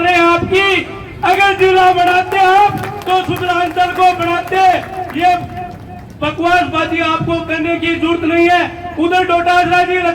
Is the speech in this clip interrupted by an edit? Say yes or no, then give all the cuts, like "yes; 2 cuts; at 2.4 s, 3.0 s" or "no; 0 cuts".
no; 0 cuts